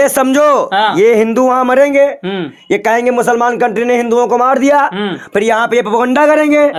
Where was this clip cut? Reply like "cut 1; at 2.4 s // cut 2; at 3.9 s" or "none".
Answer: none